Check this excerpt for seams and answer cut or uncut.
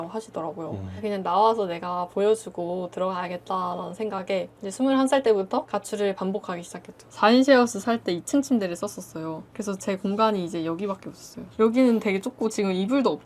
cut